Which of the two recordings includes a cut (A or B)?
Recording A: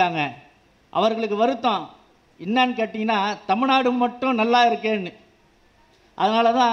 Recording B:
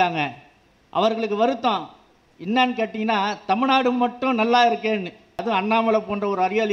B